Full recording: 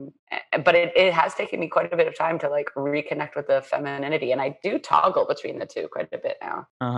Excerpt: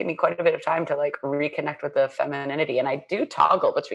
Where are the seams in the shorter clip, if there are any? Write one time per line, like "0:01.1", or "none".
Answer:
none